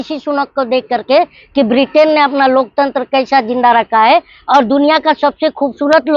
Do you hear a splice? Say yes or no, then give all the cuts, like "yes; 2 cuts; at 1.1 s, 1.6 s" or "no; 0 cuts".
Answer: no; 0 cuts